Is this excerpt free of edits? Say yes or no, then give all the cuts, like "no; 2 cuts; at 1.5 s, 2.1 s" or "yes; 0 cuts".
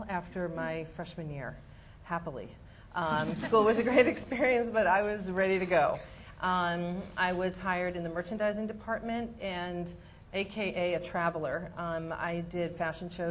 no; 1 cut; at 12.2 s